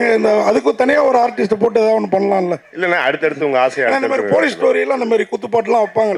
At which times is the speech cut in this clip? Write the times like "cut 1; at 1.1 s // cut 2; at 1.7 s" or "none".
none